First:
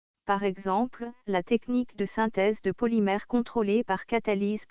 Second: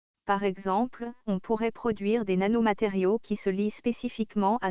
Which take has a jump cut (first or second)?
first